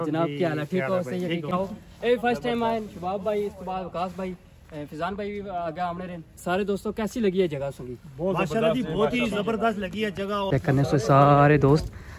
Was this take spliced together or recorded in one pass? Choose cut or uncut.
cut